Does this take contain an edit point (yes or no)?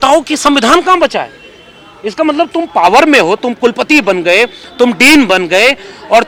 no